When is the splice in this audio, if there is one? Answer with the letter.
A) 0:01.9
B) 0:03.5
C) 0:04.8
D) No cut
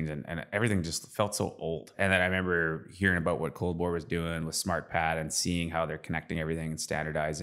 A